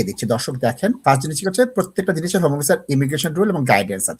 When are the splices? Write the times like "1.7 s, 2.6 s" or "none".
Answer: 1.0 s